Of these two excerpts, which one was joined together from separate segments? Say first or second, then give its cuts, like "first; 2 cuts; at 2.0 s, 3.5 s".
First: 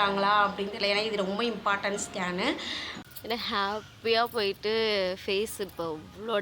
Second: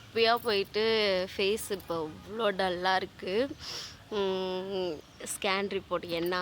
first; 1 cut; at 2.8 s